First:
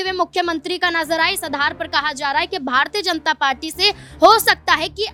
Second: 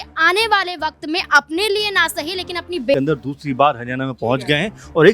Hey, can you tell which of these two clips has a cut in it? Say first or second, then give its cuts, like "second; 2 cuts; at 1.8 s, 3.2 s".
second; 1 cut; at 2.9 s